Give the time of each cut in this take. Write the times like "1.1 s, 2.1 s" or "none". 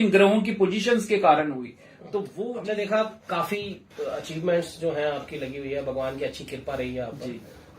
2.4 s